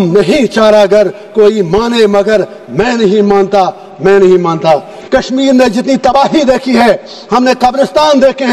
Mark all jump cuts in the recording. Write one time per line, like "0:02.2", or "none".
0:04.9